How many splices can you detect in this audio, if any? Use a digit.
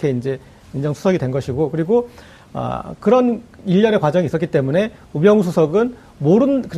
1